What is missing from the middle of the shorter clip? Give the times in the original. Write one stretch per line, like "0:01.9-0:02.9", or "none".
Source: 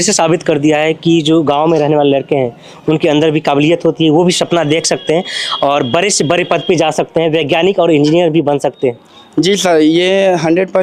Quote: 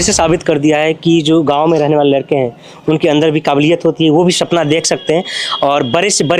none